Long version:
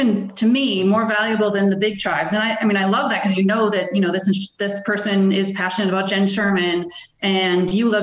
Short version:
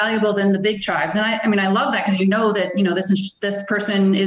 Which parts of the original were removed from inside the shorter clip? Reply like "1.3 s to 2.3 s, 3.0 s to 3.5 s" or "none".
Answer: none